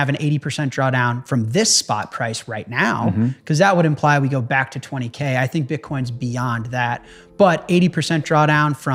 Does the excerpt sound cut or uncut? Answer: uncut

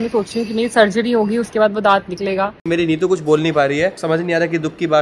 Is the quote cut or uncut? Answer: cut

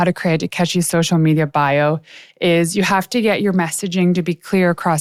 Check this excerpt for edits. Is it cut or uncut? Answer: uncut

